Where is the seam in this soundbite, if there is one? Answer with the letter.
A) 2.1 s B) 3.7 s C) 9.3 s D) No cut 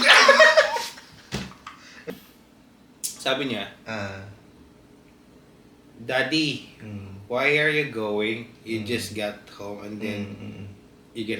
A